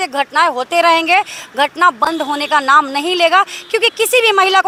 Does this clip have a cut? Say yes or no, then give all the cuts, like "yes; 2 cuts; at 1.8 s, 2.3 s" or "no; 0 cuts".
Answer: no; 0 cuts